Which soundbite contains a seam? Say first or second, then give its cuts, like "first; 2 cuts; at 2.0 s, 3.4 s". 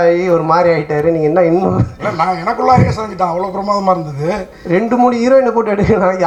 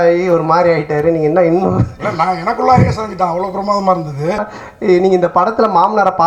second; 1 cut; at 4.5 s